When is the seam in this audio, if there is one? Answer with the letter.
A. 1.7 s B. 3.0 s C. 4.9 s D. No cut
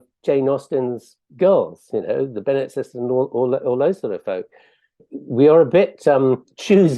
C